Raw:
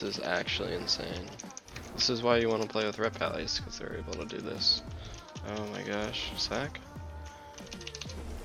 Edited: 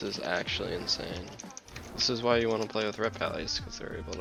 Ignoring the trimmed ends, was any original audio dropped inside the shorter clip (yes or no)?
no